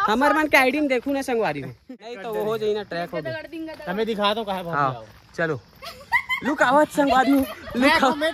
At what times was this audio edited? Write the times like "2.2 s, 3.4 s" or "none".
1.8 s